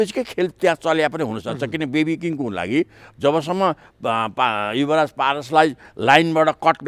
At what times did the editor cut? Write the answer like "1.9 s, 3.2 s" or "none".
none